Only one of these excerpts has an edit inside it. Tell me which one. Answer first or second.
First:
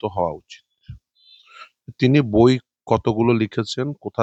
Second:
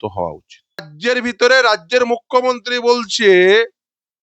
second